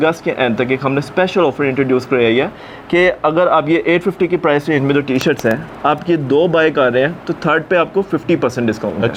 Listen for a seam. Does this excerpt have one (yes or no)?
no